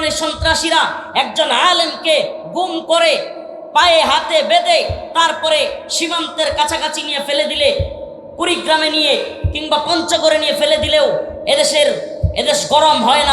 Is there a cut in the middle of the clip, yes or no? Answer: no